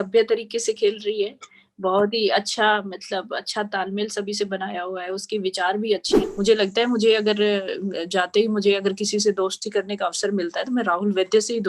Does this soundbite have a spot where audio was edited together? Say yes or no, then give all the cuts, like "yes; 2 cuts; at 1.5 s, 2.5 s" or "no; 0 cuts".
yes; 1 cut; at 6.2 s